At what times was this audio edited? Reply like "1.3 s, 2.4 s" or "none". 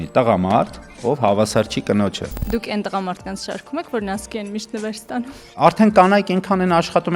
2.3 s, 5.5 s